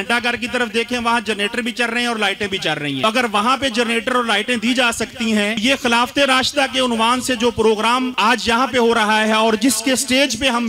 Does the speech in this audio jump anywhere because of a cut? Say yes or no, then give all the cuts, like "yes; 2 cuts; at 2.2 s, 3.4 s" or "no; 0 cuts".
yes; 3 cuts; at 3.0 s, 5.6 s, 8.1 s